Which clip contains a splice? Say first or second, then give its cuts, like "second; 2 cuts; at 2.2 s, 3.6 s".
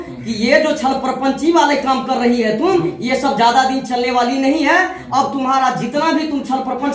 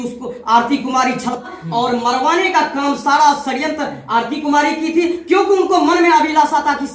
second; 1 cut; at 1.5 s